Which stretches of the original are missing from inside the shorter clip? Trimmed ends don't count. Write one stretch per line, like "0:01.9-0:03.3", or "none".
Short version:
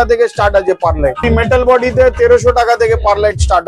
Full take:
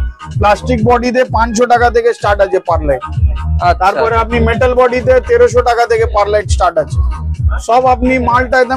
0:03.0-0:04.3